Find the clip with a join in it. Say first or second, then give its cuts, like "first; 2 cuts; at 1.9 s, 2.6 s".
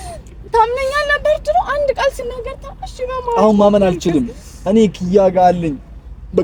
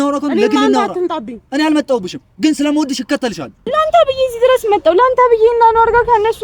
second; 1 cut; at 3.6 s